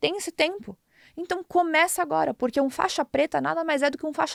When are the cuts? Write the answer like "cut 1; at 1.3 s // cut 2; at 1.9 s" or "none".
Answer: none